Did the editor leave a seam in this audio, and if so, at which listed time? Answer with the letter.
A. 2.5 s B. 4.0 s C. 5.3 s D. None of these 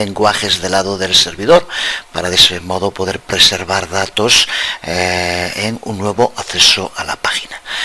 A